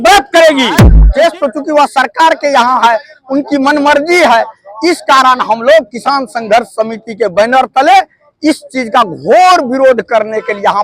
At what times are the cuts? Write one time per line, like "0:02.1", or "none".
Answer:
0:01.0